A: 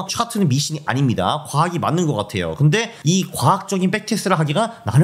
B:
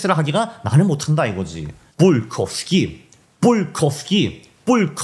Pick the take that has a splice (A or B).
A